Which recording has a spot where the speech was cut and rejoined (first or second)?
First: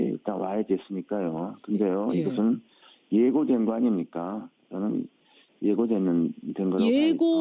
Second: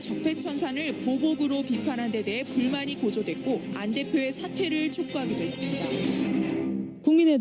first